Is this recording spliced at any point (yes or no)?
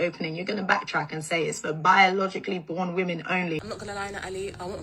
no